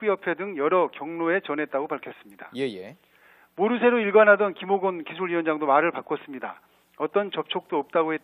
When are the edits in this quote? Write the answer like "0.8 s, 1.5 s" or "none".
none

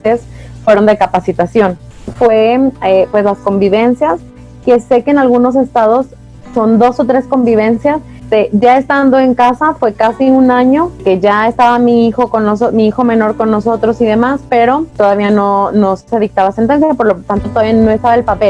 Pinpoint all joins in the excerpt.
2.0 s, 8.2 s, 11.0 s, 14.9 s

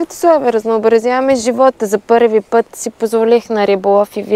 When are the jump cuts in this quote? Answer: none

